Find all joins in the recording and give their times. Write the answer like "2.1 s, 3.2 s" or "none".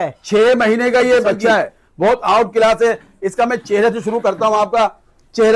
1.8 s